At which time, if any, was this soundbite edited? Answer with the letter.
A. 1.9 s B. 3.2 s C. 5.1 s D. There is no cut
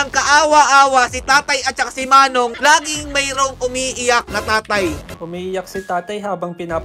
C